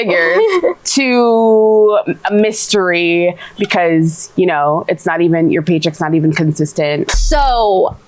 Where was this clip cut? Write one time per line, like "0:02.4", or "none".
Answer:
0:07.1